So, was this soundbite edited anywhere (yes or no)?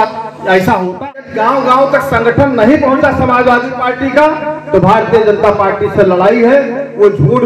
yes